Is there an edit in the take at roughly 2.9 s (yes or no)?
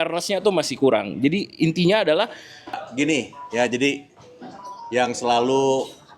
yes